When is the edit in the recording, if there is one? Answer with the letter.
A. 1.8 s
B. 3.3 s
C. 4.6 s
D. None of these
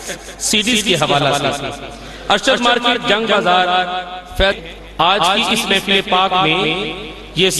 C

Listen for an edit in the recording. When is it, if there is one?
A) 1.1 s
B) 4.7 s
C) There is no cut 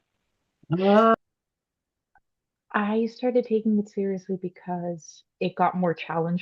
A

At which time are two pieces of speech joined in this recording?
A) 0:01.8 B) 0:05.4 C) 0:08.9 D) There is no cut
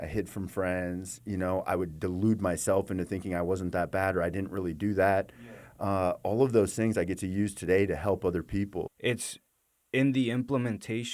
C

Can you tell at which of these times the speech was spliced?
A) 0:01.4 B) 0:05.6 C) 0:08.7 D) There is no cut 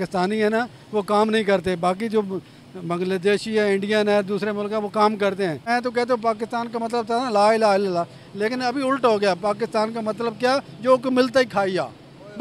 B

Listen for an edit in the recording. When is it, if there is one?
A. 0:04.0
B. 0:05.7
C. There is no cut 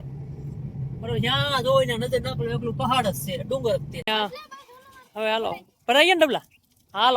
A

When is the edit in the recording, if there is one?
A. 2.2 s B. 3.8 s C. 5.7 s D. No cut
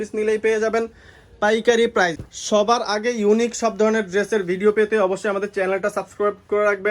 A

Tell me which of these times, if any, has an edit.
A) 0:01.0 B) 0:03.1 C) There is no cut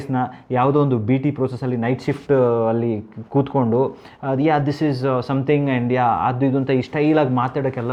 C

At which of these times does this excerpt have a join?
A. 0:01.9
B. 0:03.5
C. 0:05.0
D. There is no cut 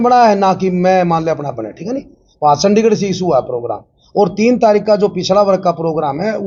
D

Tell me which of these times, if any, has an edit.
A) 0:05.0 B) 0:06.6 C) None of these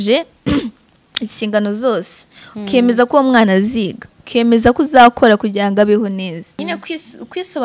B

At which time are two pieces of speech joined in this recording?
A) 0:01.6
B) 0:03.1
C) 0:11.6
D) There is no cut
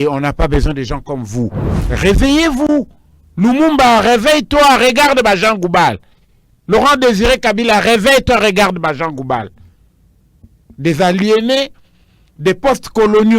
A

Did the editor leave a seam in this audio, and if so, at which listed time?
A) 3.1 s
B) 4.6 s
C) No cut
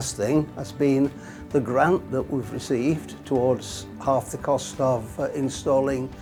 C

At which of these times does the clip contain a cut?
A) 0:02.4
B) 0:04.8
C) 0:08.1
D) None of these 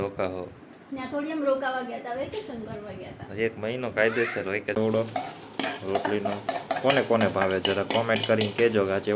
B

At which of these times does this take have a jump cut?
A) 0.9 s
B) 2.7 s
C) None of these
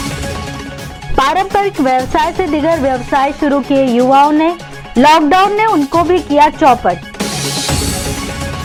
C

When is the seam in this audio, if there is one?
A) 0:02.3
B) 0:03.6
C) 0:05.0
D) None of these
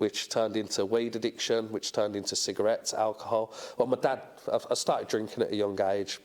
D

